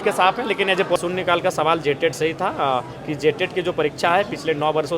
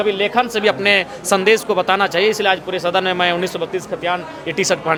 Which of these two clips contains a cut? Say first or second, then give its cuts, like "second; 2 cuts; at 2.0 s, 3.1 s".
first; 1 cut; at 1.0 s